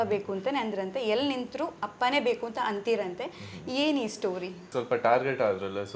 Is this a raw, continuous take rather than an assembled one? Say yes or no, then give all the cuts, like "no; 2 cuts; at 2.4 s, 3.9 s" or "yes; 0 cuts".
no; 1 cut; at 4.7 s